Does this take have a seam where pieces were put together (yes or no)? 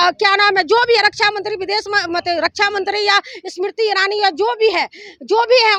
no